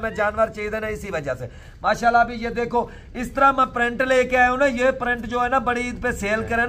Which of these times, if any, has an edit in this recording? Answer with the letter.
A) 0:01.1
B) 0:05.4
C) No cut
C